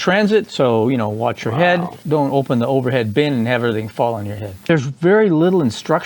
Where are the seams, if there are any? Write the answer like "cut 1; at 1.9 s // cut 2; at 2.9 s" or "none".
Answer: cut 1; at 2.0 s // cut 2; at 4.6 s